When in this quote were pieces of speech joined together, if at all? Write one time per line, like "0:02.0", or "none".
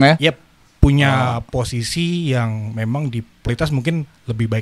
0:03.5